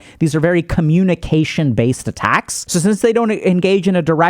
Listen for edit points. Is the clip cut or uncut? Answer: cut